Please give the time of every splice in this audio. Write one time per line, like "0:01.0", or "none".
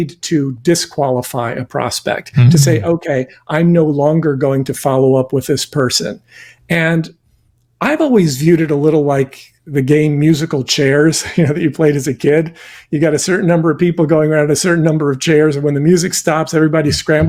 none